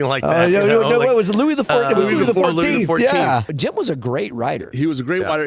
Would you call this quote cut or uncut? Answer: cut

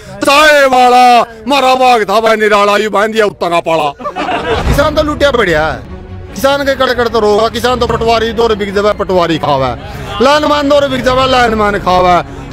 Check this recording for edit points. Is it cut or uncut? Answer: cut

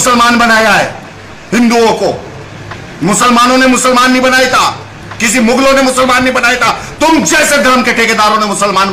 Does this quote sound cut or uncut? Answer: uncut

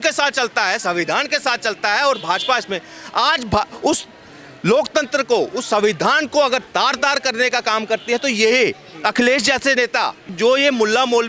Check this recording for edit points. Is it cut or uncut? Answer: cut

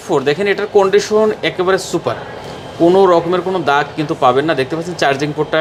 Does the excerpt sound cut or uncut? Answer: uncut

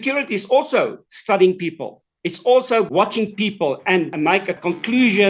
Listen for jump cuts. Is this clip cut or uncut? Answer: cut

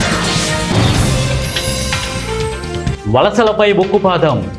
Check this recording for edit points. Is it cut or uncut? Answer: cut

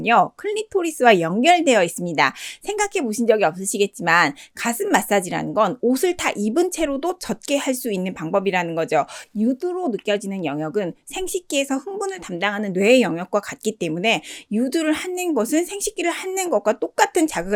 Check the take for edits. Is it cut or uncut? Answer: uncut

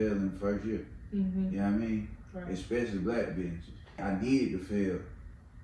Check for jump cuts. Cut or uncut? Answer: cut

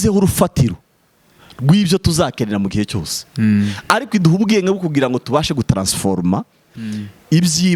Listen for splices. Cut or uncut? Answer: uncut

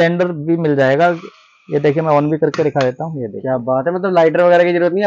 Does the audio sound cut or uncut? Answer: uncut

